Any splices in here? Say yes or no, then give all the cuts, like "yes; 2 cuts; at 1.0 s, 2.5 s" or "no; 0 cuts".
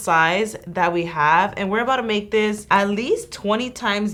no; 0 cuts